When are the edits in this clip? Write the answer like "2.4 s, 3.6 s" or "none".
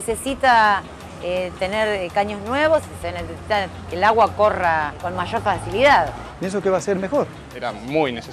none